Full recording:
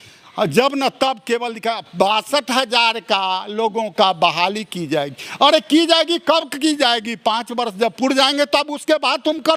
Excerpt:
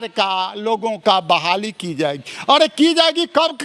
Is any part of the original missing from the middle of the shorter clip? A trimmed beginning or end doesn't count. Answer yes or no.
no